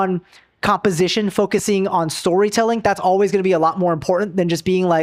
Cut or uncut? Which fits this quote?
uncut